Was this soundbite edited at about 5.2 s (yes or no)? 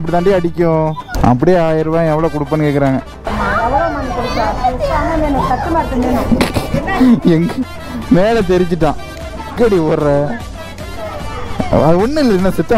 no